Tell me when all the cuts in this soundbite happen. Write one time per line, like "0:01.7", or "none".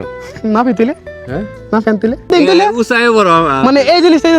0:02.3